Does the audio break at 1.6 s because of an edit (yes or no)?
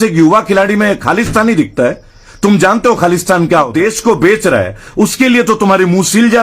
no